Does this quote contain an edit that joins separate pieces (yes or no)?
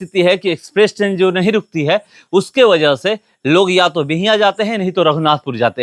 no